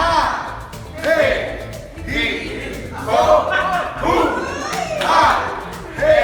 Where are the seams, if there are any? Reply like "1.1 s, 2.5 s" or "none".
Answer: 2.8 s